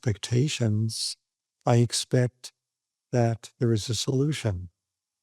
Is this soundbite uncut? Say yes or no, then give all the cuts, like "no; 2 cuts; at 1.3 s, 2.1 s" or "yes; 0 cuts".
yes; 0 cuts